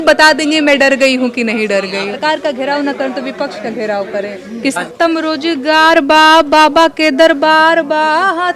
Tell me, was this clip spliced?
yes; 2 cuts; at 2.2 s, 4.8 s

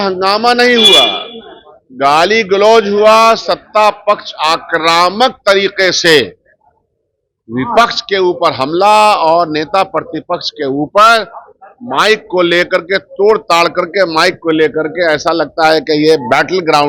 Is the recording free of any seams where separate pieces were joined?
yes; 0 cuts

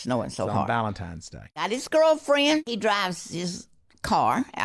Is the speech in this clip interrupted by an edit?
yes; 2 cuts; at 1.6 s, 2.7 s

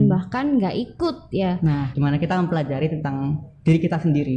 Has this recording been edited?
yes; 1 cut; at 1.9 s

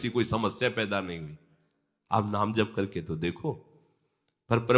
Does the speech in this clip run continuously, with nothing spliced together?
yes; 0 cuts

